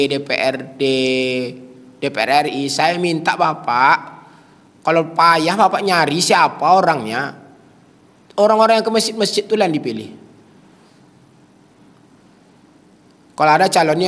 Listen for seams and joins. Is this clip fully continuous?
yes; 0 cuts

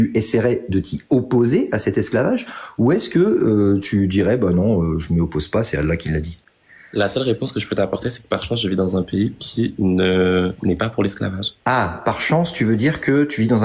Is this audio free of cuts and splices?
yes; 0 cuts

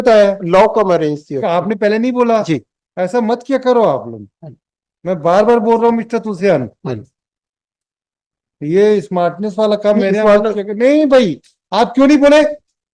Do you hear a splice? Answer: no; 0 cuts

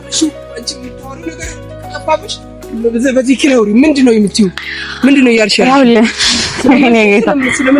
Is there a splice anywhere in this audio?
no; 0 cuts

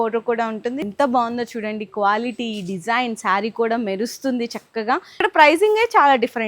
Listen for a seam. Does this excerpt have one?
yes; 2 cuts; at 0.8 s, 5.2 s

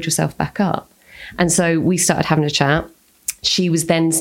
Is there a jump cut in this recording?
no; 0 cuts

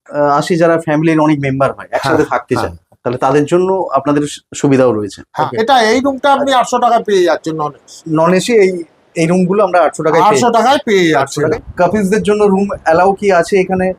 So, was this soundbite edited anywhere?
yes; 2 cuts; at 5.2 s, 11.5 s

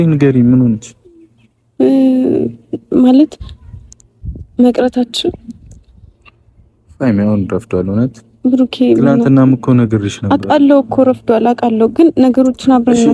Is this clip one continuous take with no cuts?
yes; 0 cuts

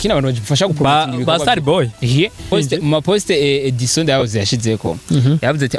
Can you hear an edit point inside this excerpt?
yes; 1 cut; at 2.5 s

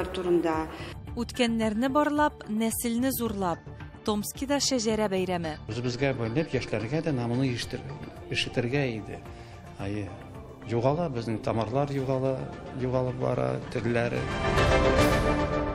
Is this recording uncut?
no; 1 cut; at 14.2 s

